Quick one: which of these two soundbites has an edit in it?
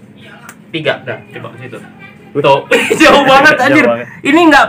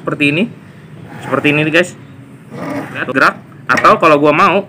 second; 1 cut; at 3.0 s

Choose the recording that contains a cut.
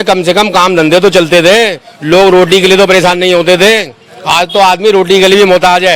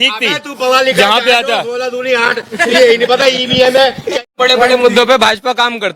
second; 1 cut; at 4.2 s

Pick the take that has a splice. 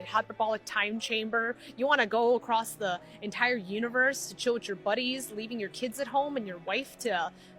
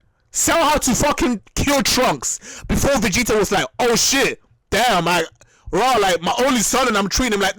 first; 3 cuts; at 1.6 s, 5.7 s, 6.6 s

